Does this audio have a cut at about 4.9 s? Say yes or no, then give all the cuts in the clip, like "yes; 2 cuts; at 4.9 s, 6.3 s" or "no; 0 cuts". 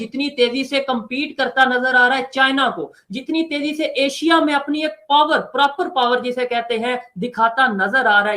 no; 0 cuts